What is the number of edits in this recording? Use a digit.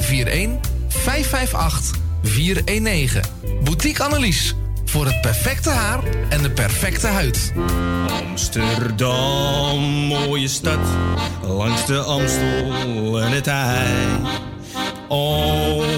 1